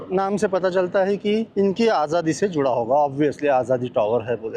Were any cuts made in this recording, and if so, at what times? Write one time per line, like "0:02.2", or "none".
none